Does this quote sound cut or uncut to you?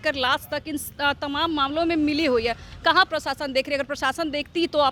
uncut